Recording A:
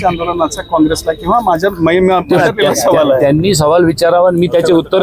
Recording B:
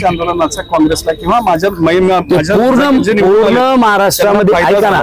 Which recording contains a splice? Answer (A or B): A